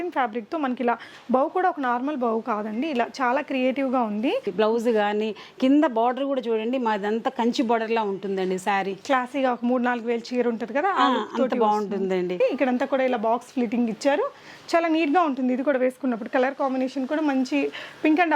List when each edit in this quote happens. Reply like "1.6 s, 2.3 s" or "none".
4.5 s, 12.4 s

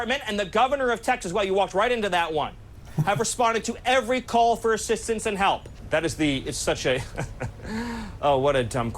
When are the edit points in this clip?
5.7 s

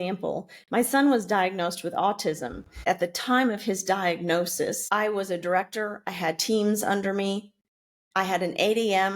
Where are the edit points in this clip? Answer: 2.8 s, 4.8 s

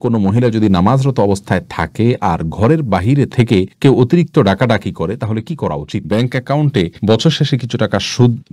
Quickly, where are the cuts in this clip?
6.1 s

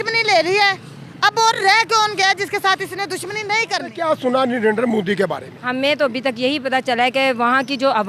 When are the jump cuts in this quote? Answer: 3.9 s

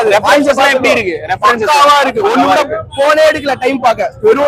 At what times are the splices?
none

